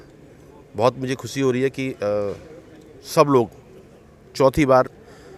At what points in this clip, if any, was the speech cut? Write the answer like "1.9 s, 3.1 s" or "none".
none